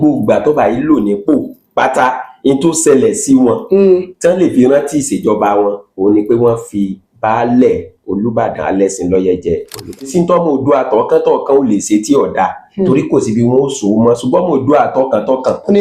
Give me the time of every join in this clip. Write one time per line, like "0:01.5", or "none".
0:10.0